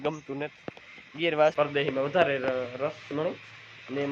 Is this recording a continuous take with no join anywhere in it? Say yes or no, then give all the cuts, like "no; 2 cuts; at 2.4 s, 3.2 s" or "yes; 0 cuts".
no; 1 cut; at 1.5 s